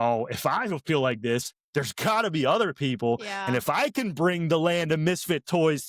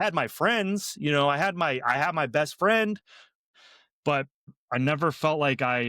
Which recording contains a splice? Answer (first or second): second